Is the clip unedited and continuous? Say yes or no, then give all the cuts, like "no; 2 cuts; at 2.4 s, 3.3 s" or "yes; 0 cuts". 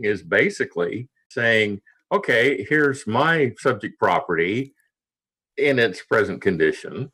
no; 1 cut; at 1.3 s